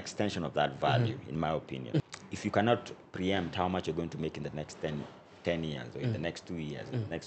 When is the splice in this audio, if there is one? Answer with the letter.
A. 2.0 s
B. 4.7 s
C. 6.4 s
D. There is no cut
A